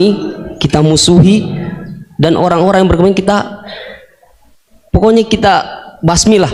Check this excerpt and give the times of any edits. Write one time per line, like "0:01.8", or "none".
none